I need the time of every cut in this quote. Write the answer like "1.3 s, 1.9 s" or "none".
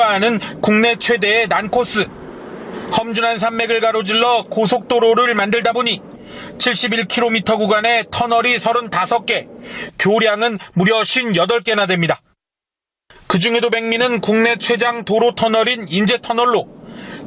3.7 s